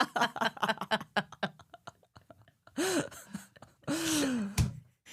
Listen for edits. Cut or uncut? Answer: uncut